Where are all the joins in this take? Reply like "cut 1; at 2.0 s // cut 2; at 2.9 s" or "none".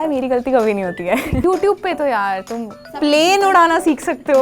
cut 1; at 1.4 s